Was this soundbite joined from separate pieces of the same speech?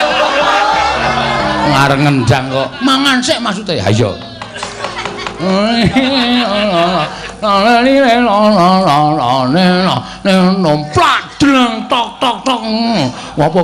no; 0 cuts

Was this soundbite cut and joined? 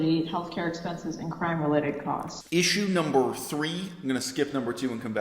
yes; 1 cut; at 2.3 s

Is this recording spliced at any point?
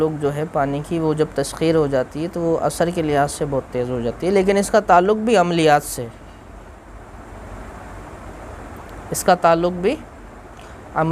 no; 0 cuts

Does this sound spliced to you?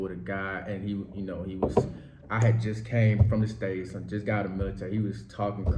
no; 0 cuts

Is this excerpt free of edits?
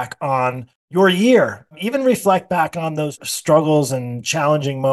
yes; 0 cuts

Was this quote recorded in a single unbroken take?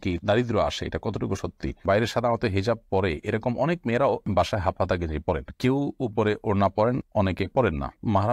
no; 1 cut; at 1.8 s

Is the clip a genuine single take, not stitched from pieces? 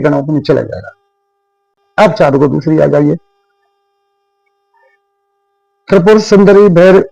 no; 1 cut; at 1.8 s

